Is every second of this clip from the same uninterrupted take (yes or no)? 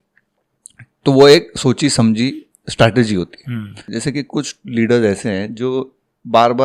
no